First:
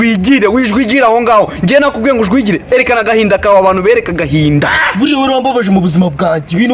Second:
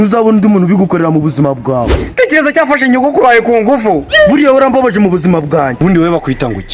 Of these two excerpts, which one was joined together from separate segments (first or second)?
second